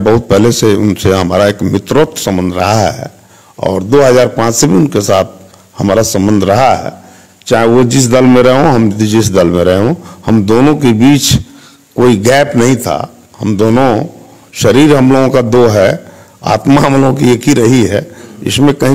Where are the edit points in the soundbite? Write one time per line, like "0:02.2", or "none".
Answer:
none